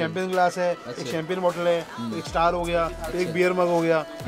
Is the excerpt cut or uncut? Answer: uncut